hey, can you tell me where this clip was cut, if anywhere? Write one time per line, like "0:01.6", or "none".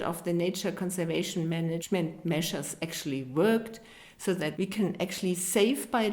0:01.8
0:04.1